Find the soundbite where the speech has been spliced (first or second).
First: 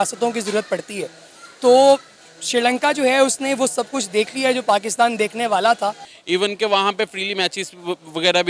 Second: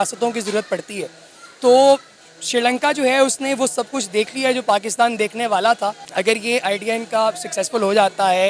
first